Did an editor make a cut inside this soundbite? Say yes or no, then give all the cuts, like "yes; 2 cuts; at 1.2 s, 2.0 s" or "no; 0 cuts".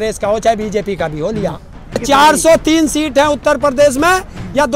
yes; 1 cut; at 2.0 s